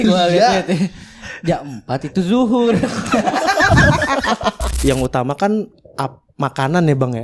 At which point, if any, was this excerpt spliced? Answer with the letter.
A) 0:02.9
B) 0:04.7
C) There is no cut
B